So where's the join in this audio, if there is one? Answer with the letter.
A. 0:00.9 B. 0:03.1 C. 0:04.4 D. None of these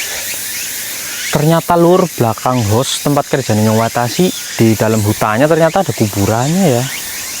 C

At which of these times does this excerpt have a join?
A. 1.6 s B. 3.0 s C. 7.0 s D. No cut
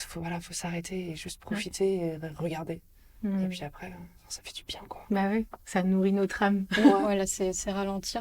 C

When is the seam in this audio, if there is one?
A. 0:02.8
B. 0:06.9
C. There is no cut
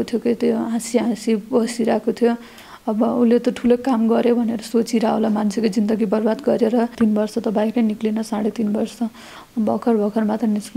B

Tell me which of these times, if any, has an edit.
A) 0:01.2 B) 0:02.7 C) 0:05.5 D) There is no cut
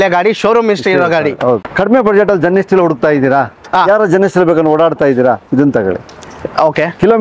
D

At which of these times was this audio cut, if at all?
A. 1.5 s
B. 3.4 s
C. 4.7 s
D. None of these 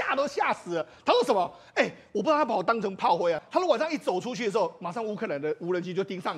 B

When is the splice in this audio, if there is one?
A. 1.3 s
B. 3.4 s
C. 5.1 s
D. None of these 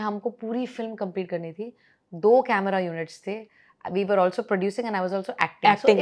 D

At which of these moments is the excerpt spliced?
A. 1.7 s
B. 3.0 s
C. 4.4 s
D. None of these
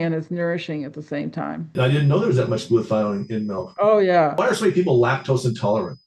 A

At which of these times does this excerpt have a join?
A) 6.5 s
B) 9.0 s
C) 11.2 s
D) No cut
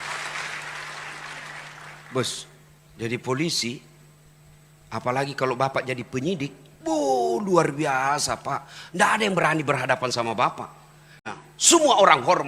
C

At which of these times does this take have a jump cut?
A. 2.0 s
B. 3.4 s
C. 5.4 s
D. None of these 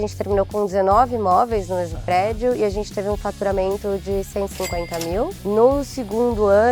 C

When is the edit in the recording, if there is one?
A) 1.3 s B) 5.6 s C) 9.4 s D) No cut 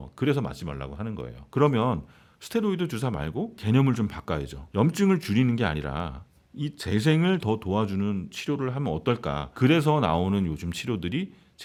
D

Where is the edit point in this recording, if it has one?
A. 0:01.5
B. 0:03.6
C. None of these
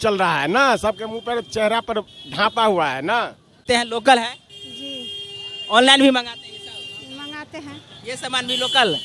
B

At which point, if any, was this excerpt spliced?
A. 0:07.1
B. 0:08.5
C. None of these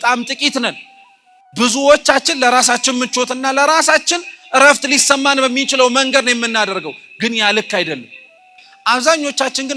B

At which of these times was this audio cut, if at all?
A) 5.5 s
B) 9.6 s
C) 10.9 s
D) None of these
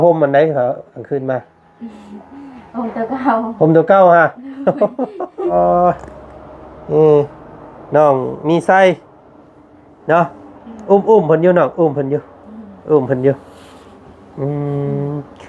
A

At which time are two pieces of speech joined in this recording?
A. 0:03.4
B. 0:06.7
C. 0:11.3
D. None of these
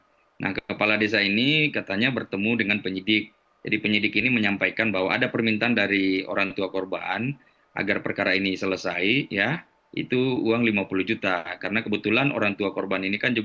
D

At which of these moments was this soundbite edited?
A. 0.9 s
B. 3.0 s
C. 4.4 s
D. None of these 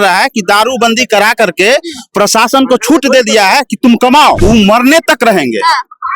C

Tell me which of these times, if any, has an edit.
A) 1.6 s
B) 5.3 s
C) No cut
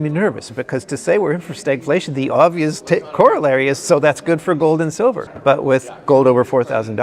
B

